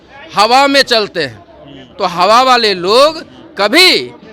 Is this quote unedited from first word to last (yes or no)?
yes